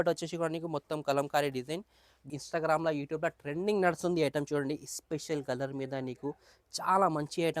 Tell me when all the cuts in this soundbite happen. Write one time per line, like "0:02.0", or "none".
0:02.3